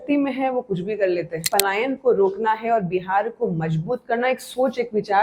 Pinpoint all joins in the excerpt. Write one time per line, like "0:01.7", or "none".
0:01.4